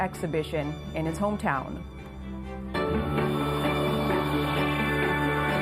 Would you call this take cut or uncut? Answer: cut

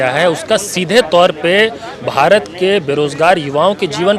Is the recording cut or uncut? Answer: uncut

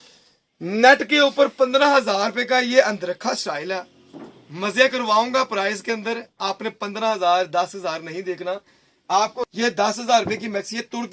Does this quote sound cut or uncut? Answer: cut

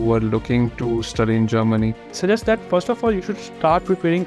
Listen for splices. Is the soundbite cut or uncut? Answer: cut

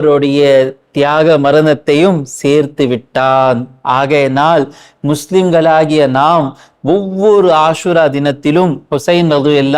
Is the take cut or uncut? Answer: uncut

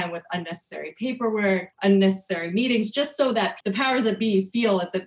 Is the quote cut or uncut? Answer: cut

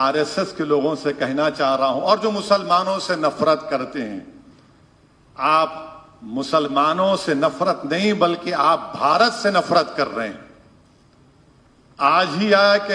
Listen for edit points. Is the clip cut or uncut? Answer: uncut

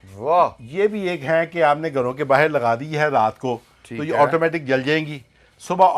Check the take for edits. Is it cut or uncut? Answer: uncut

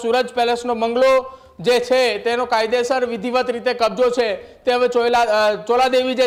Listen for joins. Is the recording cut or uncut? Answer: uncut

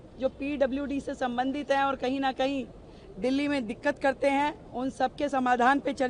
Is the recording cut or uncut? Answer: uncut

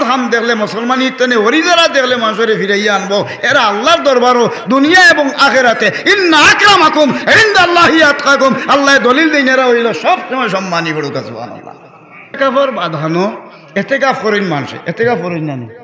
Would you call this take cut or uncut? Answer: cut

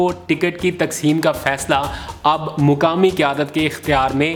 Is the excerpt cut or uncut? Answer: uncut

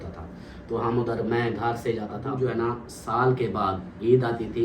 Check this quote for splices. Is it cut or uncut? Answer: cut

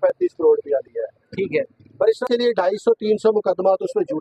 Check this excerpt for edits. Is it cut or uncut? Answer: cut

